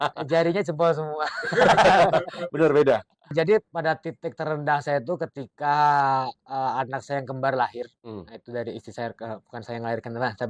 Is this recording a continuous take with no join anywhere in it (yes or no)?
no